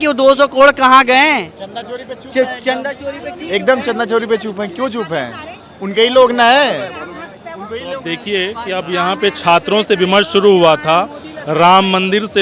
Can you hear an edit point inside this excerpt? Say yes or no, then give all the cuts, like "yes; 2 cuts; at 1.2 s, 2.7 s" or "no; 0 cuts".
no; 0 cuts